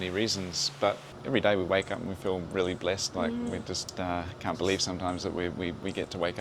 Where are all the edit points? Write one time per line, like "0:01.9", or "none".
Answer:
0:01.1
0:03.9